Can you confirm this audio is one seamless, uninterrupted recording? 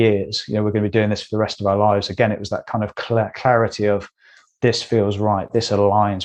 yes; 0 cuts

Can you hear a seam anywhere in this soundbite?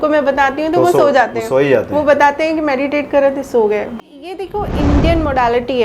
yes; 1 cut; at 4.0 s

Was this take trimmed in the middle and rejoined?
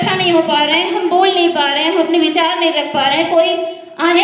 no; 0 cuts

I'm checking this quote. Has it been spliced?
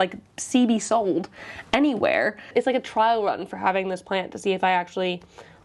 yes; 1 cut; at 2.5 s

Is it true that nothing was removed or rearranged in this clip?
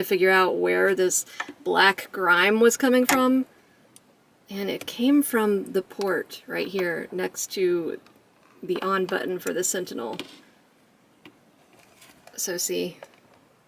yes; 0 cuts

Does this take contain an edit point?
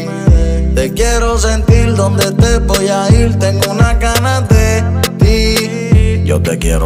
no; 0 cuts

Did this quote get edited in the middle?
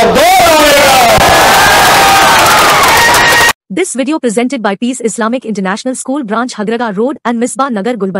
yes; 1 cut; at 3.5 s

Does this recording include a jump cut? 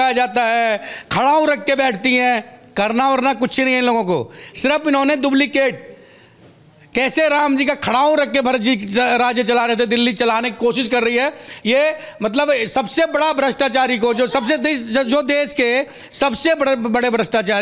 no; 0 cuts

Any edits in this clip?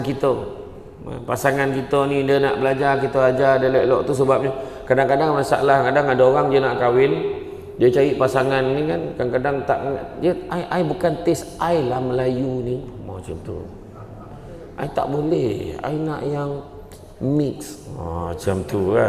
no; 0 cuts

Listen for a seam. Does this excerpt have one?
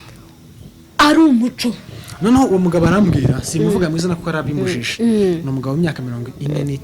no; 0 cuts

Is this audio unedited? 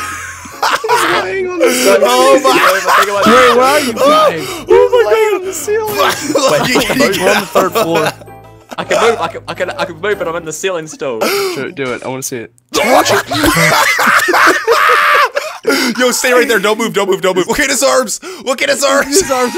no; 1 cut; at 11.3 s

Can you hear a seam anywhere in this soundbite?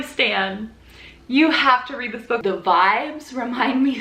yes; 1 cut; at 2.4 s

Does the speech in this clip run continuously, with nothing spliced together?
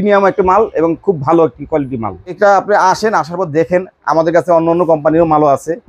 no; 1 cut; at 2.4 s

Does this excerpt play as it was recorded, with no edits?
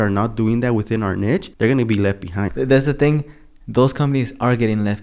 no; 2 cuts; at 1.5 s, 2.5 s

